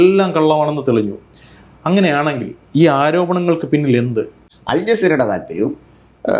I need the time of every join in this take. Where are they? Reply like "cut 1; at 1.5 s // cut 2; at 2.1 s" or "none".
cut 1; at 4.5 s